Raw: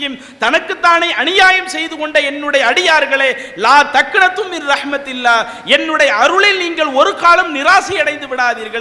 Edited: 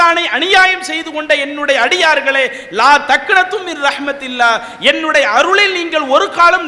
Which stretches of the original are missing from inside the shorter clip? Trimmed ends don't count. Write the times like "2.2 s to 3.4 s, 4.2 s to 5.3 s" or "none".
none